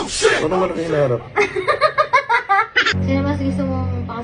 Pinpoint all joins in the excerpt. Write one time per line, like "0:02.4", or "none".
0:02.9